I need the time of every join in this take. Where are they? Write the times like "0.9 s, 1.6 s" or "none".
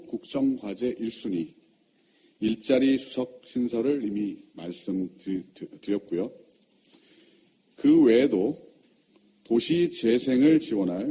5.6 s